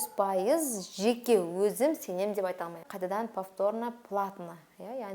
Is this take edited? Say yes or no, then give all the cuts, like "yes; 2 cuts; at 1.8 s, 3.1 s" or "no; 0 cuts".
yes; 1 cut; at 2.9 s